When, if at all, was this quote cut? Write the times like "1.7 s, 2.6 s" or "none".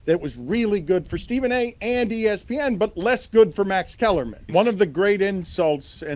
4.5 s